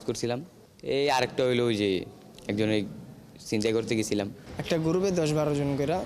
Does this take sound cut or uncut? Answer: cut